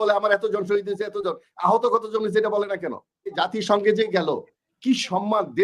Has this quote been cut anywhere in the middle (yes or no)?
yes